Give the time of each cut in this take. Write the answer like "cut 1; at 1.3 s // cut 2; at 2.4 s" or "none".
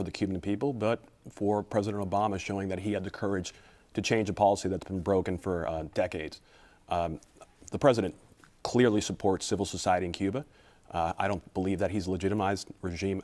none